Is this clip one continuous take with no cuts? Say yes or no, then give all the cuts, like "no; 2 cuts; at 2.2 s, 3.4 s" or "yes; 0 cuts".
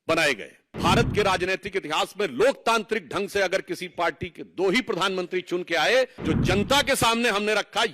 no; 2 cuts; at 0.8 s, 6.2 s